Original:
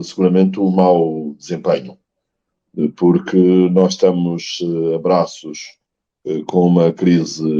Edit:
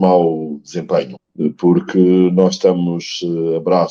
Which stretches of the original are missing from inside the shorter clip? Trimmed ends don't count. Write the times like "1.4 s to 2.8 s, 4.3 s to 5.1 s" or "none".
2.0 s to 2.6 s